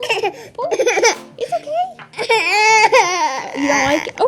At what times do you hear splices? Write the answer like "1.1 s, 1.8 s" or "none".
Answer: none